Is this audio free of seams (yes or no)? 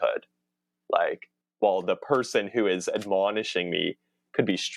no